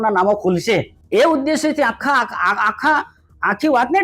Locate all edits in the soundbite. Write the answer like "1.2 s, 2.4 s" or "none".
1.0 s